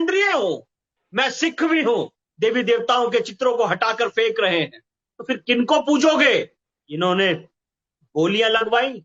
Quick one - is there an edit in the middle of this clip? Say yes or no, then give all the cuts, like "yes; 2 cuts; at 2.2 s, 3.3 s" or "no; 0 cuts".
yes; 3 cuts; at 2.2 s, 5.1 s, 6.6 s